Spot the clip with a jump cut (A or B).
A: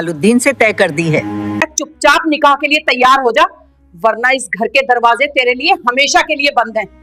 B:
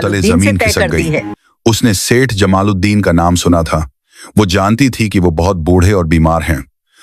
A